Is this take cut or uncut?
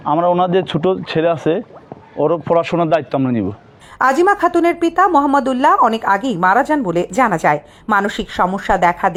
uncut